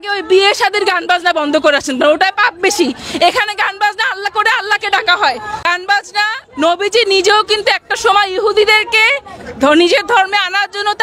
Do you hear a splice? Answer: yes; 1 cut; at 5.6 s

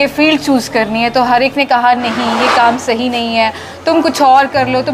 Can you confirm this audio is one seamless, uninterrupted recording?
yes; 0 cuts

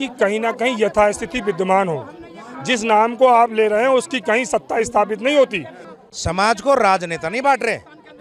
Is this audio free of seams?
no; 1 cut; at 6.0 s

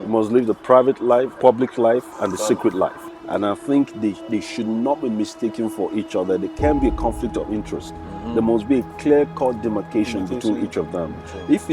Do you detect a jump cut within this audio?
yes; 3 cuts; at 1.3 s, 2.1 s, 3.1 s

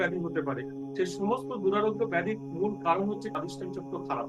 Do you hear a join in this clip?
yes; 1 cut; at 3.3 s

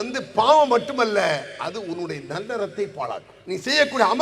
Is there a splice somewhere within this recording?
yes; 1 cut; at 3.3 s

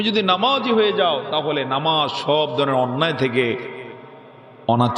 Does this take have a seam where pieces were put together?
no; 0 cuts

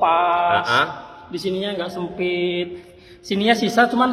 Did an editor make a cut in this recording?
no; 0 cuts

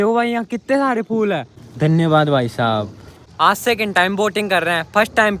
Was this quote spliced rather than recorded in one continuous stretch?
yes; 2 cuts; at 1.6 s, 3.2 s

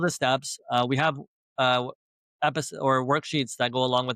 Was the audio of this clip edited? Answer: no; 0 cuts

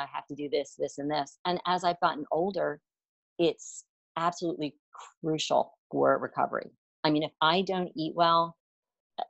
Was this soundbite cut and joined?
no; 0 cuts

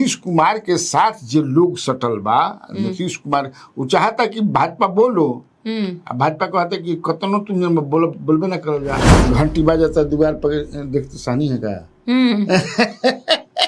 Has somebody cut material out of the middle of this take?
yes; 1 cut; at 9.1 s

